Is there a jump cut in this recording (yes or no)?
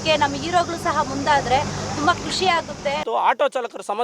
yes